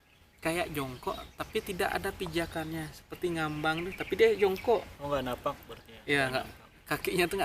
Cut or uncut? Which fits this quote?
uncut